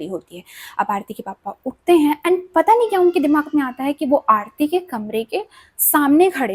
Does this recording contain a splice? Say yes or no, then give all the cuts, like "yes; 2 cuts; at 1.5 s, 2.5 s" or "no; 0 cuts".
no; 0 cuts